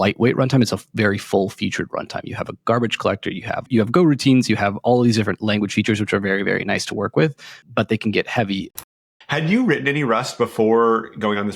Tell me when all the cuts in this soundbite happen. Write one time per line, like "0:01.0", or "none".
0:03.7
0:07.5
0:08.8

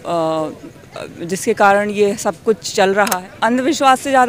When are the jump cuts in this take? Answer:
0:03.2

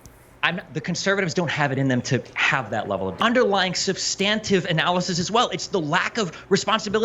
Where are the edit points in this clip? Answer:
0:03.2

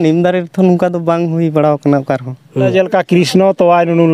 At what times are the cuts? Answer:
0:02.7

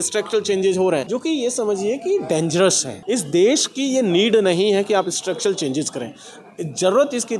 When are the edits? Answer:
0:01.1
0:02.9

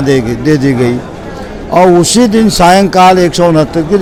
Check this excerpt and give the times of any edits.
none

